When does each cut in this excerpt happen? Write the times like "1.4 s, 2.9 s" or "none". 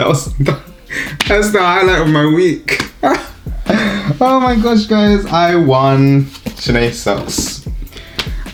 none